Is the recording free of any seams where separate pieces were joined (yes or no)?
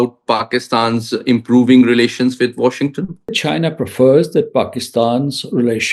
no